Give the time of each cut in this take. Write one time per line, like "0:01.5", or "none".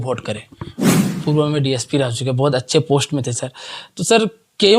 0:01.0